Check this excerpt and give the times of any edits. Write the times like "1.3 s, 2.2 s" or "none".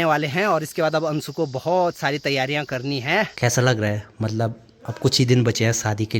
3.3 s